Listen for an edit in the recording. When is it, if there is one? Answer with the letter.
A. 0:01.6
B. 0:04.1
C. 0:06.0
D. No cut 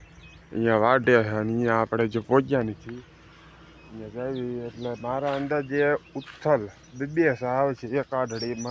D